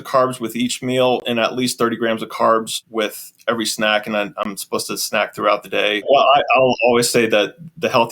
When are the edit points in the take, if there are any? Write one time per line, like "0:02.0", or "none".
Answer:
0:02.8
0:06.1